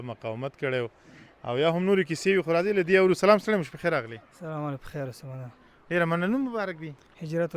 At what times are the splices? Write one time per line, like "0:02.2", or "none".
none